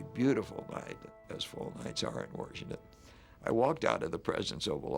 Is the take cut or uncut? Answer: cut